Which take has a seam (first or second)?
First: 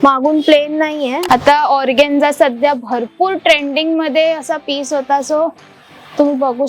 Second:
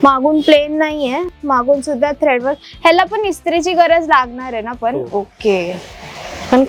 first